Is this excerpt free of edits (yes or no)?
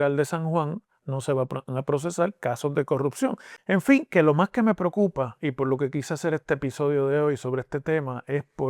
no